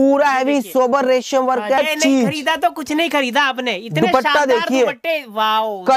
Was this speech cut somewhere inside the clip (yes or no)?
yes